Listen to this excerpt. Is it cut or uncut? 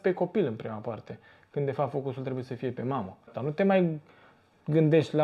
cut